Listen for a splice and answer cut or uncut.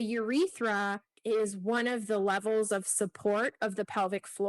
cut